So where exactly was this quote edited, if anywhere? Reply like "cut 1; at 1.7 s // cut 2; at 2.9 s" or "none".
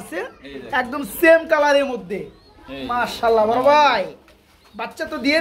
none